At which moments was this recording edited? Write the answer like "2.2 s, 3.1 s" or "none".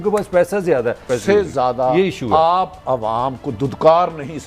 1.1 s

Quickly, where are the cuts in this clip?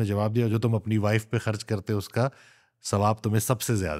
none

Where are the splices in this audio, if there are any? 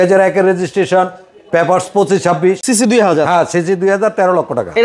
2.6 s

